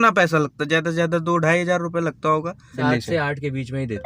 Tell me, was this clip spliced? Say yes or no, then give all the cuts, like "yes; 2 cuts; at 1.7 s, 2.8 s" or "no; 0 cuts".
yes; 1 cut; at 2.7 s